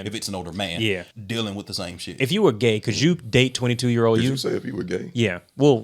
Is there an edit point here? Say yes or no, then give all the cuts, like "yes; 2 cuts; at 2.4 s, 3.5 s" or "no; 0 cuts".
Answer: yes; 1 cut; at 1.1 s